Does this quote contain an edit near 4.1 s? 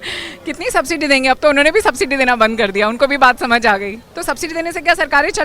yes; 1 cut; at 4.1 s

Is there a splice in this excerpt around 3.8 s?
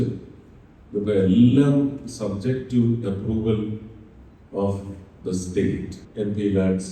no; 1 cut; at 6.0 s

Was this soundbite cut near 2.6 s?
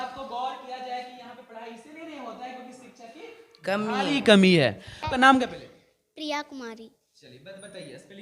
no; 1 cut; at 4.9 s

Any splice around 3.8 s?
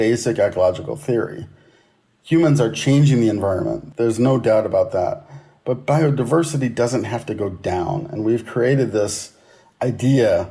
yes; 1 cut; at 3.8 s

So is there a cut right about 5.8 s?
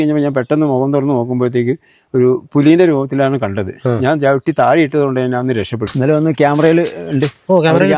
yes; 1 cut; at 5.8 s

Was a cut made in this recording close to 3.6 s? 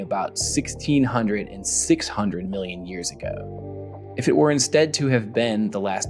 yes; 1 cut; at 3.6 s

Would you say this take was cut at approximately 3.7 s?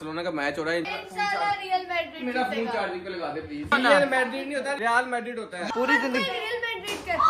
yes; 3 cuts; at 0.9 s, 3.7 s, 5.1 s

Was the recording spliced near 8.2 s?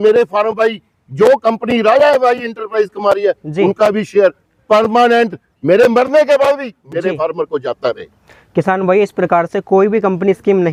no; 0 cuts

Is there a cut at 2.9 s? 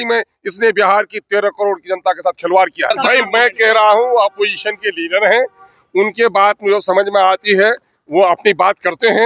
yes; 1 cut; at 2.9 s

